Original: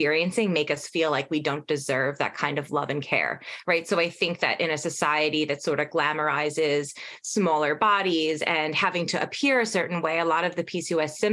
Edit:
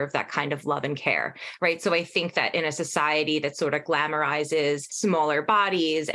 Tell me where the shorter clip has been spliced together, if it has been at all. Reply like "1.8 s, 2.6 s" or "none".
4.9 s